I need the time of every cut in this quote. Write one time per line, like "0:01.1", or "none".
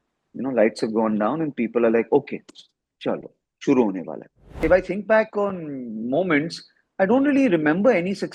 0:04.5